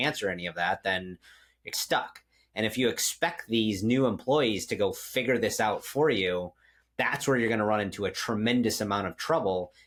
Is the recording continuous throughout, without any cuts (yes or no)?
yes